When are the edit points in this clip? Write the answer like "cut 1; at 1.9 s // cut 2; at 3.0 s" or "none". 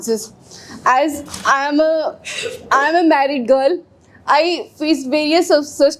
none

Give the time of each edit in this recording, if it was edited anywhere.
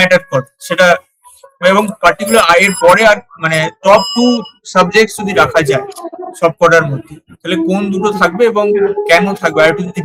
none

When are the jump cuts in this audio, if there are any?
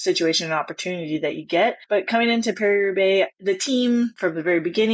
cut 1; at 1.8 s // cut 2; at 3.4 s // cut 3; at 4.1 s

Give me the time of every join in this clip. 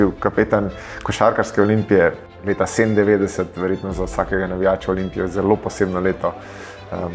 cut 1; at 2.4 s

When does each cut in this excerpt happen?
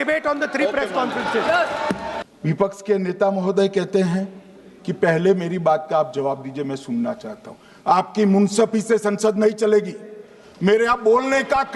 cut 1; at 2.2 s

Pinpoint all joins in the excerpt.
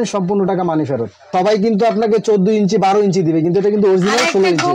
cut 1; at 1.3 s

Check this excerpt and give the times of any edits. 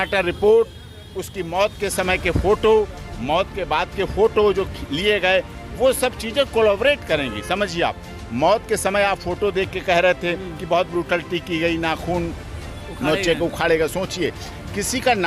none

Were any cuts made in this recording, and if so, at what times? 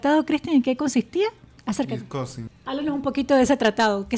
cut 1; at 1.5 s // cut 2; at 2.5 s

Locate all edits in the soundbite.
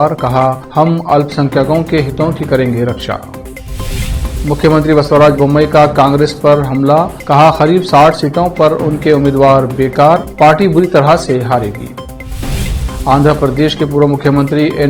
none

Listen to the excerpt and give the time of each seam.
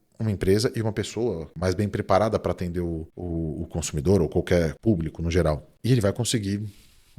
cut 1; at 1.5 s // cut 2; at 3.1 s // cut 3; at 4.8 s // cut 4; at 5.7 s

